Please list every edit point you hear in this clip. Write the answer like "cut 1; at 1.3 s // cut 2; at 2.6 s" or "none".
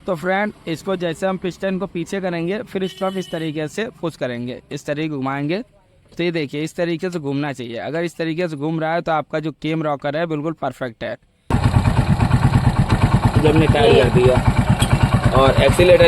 cut 1; at 11.5 s

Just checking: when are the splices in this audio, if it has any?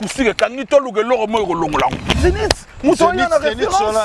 cut 1; at 2.2 s

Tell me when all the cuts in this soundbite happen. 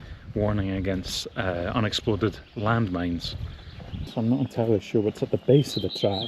cut 1; at 4.1 s

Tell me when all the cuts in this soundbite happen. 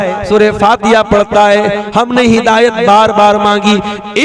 cut 1; at 1.8 s

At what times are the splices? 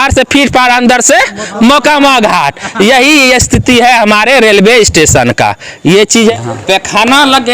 cut 1; at 6.3 s

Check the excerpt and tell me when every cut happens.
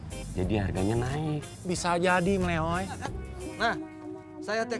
cut 1; at 3.3 s

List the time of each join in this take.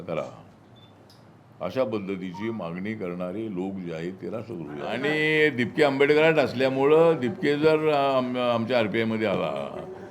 cut 1; at 4.9 s

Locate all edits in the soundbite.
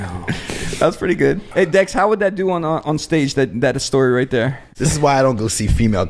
cut 1; at 1.4 s // cut 2; at 4.6 s

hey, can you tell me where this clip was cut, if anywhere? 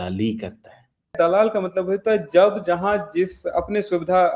cut 1; at 1.1 s

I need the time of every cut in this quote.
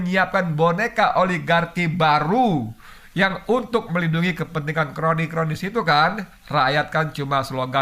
none

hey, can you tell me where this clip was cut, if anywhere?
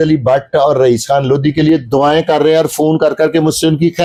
none

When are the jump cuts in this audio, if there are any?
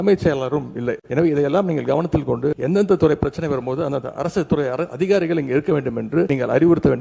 cut 1; at 1.0 s // cut 2; at 2.6 s // cut 3; at 6.3 s

